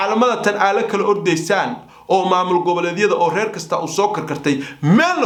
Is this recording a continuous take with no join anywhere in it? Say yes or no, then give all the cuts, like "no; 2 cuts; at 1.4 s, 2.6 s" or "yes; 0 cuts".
yes; 0 cuts